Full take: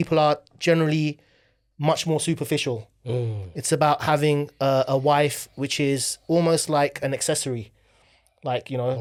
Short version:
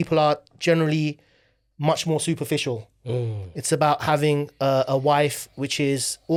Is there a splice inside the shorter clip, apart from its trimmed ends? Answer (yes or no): no